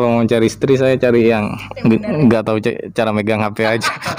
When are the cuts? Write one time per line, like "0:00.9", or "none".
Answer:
none